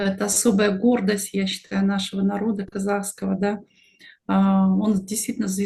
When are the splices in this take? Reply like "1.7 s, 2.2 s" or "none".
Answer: none